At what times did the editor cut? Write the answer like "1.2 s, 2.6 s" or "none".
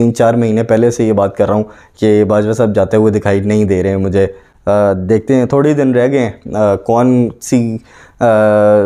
none